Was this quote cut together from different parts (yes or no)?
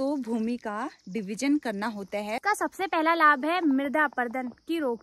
yes